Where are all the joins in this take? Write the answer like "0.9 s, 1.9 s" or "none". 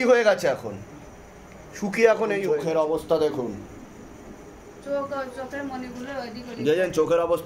2.5 s